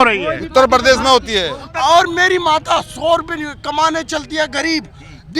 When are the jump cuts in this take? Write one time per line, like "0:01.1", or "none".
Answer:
0:01.6